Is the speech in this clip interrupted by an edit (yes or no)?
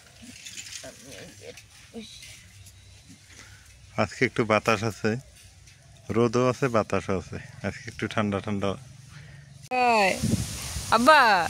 yes